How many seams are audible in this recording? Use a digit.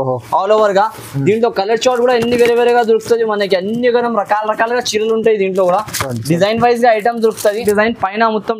1